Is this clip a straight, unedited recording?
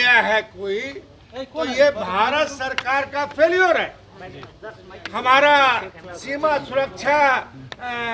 yes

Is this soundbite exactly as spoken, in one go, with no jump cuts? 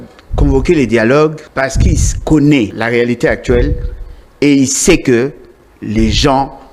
no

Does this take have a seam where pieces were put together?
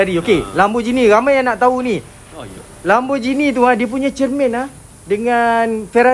no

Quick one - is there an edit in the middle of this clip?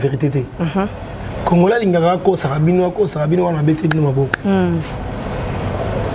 no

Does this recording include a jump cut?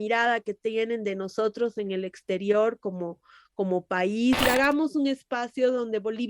yes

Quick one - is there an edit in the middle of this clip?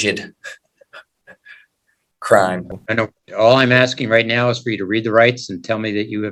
no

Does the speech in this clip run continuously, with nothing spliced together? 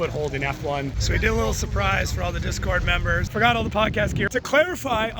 no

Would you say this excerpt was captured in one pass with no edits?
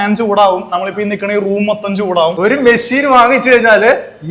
no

